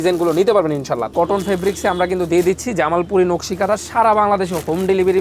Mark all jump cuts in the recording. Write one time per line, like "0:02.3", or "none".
0:01.1